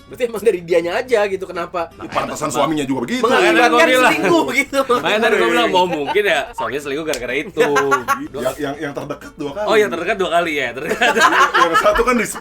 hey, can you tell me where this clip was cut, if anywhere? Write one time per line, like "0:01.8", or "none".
0:08.2